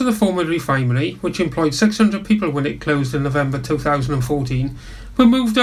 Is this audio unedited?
yes; 0 cuts

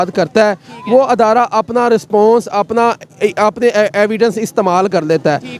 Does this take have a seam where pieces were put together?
no; 0 cuts

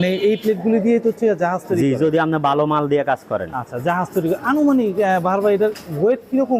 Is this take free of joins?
yes; 0 cuts

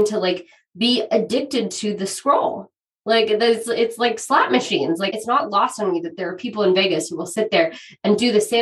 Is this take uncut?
no; 1 cut; at 5.1 s

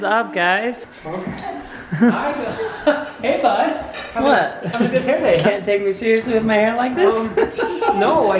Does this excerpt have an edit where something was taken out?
yes; 1 cut; at 0.9 s

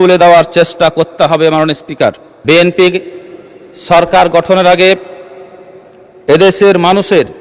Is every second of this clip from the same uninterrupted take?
no; 1 cut; at 2.3 s

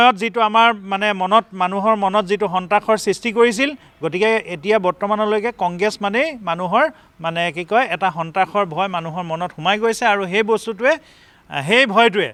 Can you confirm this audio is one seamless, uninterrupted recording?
yes; 0 cuts

